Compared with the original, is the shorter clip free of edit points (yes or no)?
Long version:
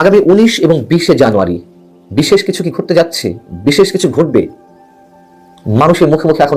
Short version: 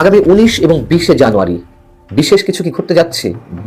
yes